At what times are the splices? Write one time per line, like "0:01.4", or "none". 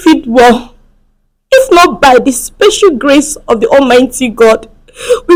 none